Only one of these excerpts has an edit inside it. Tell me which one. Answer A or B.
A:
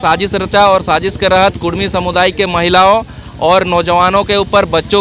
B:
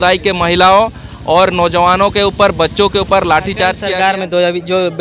B